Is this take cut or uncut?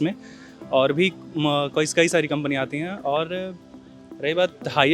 uncut